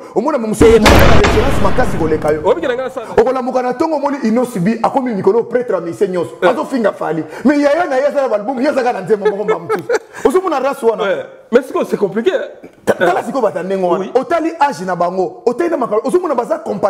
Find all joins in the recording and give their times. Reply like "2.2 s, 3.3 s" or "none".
2.9 s